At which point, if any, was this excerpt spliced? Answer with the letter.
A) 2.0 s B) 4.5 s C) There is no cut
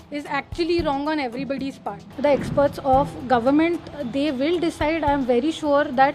A